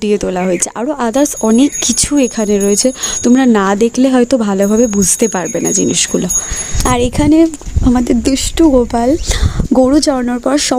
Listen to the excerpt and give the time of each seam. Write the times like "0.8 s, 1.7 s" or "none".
6.7 s